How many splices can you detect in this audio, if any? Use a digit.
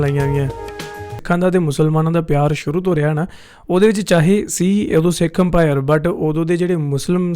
1